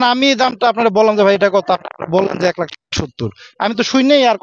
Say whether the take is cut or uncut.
uncut